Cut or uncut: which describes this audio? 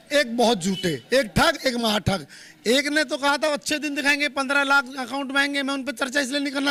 uncut